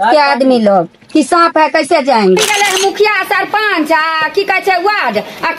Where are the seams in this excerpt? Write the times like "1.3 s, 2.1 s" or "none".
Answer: 2.4 s